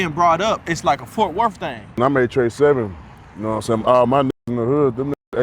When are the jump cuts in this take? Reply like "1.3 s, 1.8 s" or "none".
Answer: 2.0 s